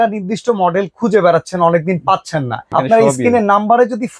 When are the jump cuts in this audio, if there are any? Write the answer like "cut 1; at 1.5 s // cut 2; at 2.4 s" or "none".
cut 1; at 2.6 s